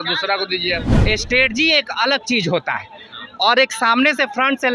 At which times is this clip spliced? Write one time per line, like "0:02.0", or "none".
0:00.9